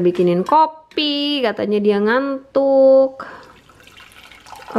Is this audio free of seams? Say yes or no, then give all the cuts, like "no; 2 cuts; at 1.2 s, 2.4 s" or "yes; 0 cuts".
yes; 0 cuts